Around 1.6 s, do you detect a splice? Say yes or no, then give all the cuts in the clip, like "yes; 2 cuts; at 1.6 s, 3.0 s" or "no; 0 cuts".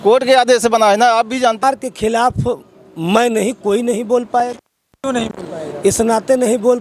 yes; 1 cut; at 1.6 s